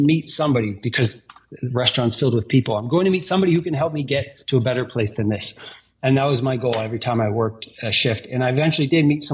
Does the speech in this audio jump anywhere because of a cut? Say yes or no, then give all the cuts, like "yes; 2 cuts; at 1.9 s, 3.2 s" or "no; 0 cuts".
no; 0 cuts